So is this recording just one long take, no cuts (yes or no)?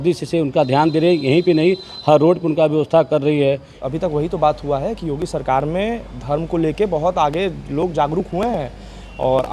no